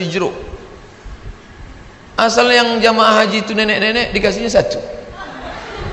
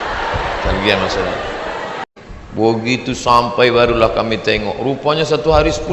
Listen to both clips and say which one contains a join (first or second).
second